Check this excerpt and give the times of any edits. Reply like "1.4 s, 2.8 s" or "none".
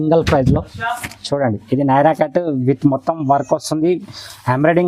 none